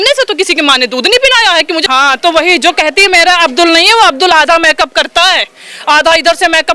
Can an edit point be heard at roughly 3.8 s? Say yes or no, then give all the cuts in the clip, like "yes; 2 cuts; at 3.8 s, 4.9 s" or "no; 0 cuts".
no; 1 cut; at 1.8 s